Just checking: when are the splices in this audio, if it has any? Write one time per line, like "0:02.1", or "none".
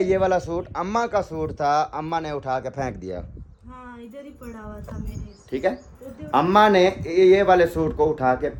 none